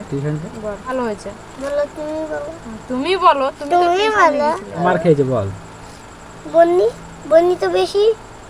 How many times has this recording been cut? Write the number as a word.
two